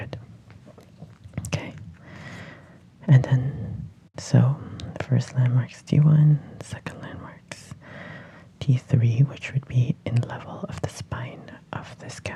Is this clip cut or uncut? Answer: uncut